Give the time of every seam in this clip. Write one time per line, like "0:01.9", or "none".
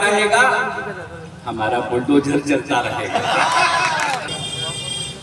0:04.3